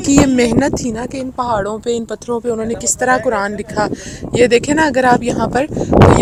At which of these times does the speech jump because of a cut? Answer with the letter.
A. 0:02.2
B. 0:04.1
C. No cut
C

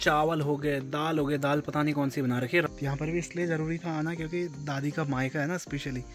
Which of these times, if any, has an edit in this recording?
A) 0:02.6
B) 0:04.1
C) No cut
A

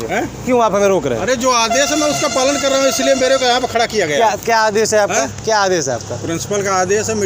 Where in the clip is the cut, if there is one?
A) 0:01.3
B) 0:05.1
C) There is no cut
C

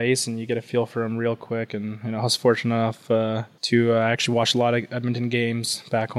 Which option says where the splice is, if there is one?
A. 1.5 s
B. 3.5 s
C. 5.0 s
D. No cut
B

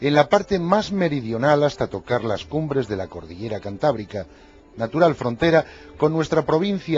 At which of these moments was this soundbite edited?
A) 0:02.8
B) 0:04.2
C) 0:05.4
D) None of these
A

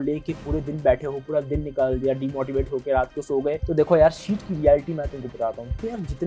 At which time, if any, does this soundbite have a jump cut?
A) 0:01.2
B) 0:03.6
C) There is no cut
B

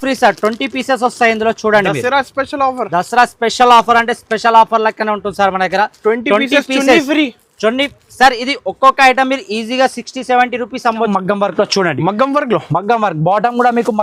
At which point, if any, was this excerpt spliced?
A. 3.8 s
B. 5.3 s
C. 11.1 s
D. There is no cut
C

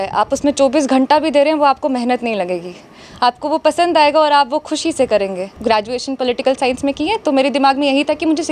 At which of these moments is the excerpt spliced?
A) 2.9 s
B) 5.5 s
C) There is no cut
B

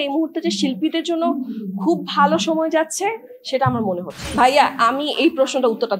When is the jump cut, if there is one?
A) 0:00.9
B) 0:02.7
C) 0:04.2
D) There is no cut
C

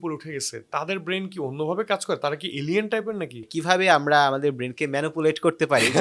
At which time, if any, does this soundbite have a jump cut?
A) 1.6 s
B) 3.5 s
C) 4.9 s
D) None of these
B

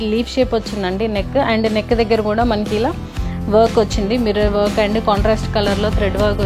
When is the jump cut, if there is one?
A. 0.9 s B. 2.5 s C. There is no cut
C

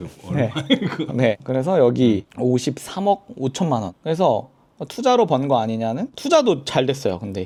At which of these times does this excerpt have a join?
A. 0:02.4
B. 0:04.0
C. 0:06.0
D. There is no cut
D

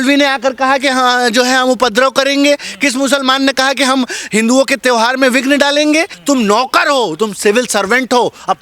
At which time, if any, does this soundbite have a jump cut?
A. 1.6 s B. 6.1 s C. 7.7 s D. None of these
B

